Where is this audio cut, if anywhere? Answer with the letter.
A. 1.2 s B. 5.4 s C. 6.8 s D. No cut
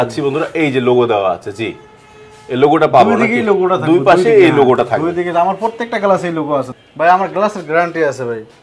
C